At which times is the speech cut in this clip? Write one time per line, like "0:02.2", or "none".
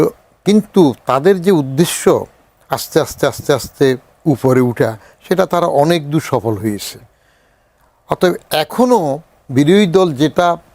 none